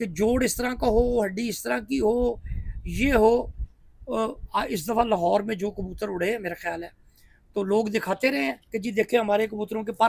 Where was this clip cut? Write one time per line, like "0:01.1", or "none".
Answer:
none

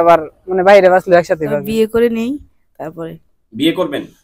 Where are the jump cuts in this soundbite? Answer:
0:01.6

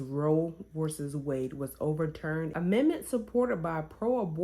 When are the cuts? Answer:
0:02.5

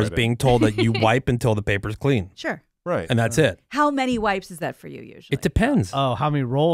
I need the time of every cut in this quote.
none

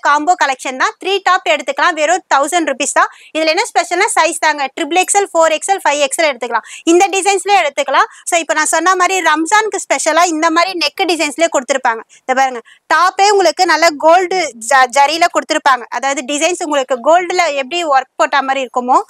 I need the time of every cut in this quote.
none

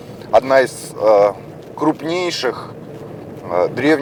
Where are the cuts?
none

